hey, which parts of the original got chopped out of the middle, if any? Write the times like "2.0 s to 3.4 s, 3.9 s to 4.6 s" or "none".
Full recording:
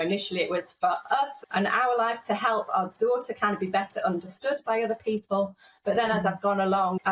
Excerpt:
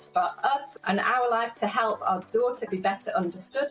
3.4 s to 3.6 s